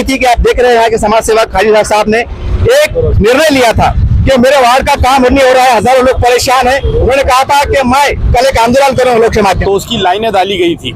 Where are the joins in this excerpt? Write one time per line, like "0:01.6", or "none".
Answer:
0:09.6